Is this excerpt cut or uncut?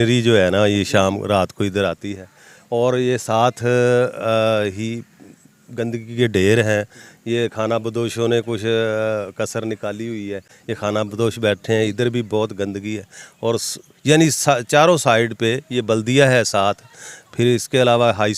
uncut